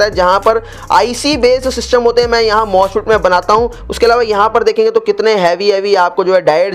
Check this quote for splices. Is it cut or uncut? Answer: uncut